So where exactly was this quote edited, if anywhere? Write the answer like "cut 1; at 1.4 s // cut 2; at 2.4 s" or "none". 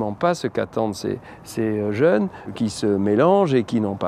cut 1; at 2.5 s